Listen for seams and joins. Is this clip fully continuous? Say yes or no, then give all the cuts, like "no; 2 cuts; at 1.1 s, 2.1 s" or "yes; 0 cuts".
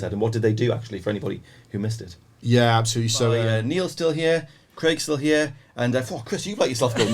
no; 1 cut; at 3.4 s